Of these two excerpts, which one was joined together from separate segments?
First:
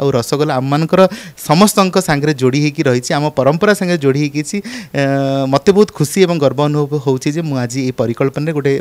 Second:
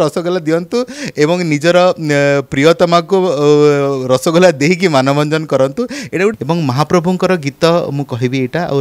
second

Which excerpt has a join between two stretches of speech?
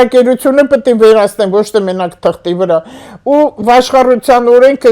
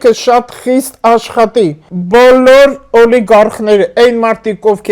second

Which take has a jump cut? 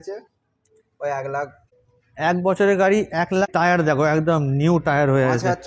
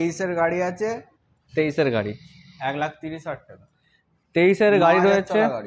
first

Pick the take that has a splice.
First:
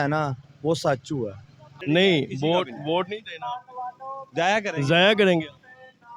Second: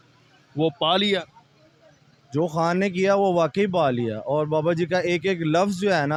first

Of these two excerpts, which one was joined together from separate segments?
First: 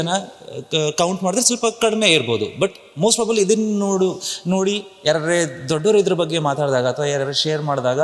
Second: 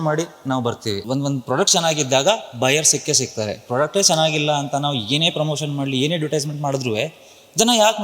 second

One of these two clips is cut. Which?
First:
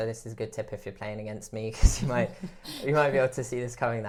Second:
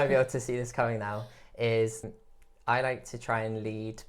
second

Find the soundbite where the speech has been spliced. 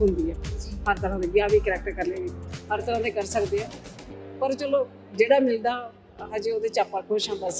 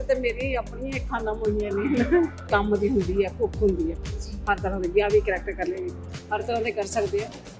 second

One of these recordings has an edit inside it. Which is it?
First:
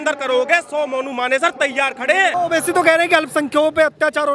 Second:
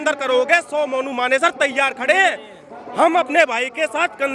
first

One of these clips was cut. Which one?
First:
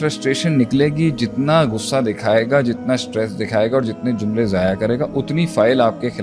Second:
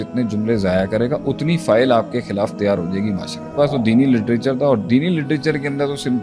second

